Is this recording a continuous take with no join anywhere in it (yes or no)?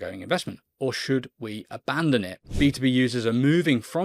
no